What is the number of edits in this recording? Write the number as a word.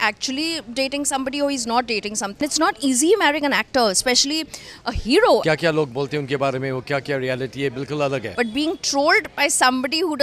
three